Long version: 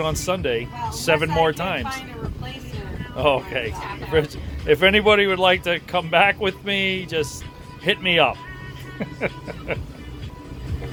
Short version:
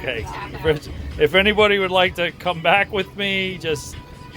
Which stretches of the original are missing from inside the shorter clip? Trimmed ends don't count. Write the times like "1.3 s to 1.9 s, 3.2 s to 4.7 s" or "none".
none